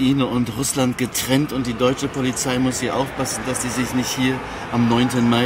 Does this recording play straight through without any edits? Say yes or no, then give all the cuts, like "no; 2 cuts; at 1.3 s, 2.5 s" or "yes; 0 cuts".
yes; 0 cuts